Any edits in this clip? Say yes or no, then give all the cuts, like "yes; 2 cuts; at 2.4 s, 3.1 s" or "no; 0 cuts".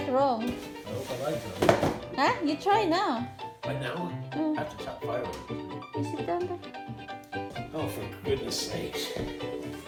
no; 0 cuts